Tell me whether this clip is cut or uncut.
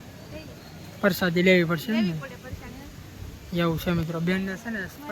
uncut